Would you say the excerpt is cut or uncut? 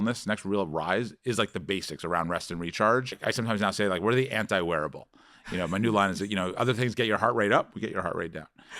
uncut